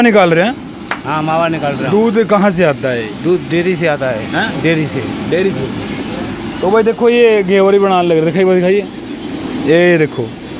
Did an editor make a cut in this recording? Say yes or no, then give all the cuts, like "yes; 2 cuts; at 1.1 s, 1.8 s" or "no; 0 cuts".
no; 0 cuts